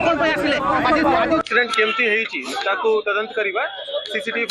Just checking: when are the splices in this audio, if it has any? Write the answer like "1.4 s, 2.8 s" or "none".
1.4 s